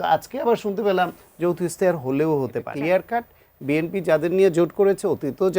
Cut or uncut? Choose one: cut